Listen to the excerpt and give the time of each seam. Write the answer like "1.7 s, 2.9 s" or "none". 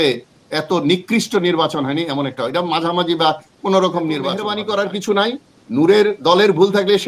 4.5 s